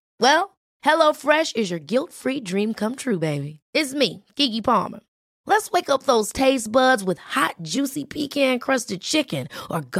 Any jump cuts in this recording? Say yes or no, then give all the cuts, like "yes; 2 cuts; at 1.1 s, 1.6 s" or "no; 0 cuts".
no; 0 cuts